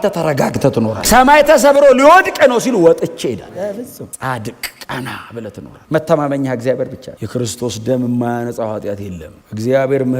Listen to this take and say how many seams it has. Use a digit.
2